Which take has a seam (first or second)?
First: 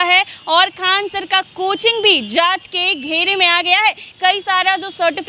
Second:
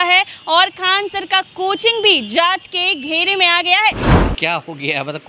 second